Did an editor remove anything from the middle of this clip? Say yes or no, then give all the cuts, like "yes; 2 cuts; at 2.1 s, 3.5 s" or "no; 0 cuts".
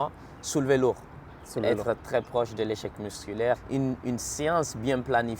yes; 1 cut; at 3.6 s